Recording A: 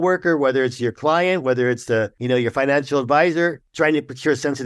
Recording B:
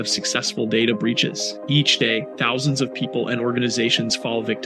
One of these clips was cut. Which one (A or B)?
A